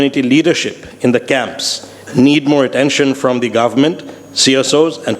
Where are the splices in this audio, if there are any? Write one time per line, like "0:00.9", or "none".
none